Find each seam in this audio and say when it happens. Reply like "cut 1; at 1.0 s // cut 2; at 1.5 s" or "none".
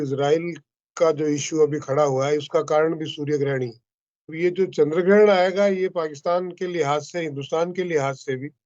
cut 1; at 4.2 s